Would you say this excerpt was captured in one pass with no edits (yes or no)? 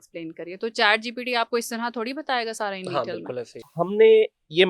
no